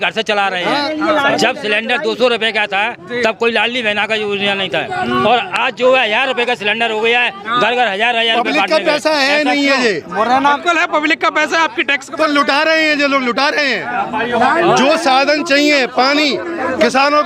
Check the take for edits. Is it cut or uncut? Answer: uncut